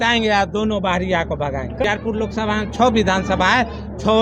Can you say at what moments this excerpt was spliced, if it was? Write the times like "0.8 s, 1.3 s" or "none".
1.9 s